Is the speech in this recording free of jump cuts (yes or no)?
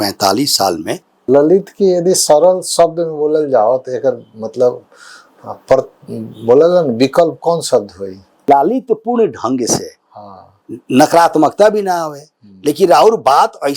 no